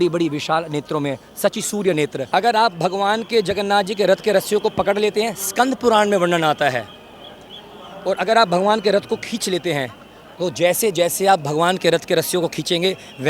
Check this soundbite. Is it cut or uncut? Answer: cut